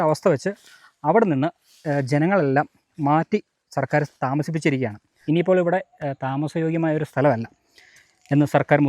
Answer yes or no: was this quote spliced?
yes